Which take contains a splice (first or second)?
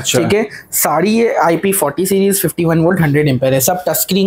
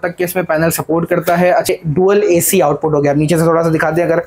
second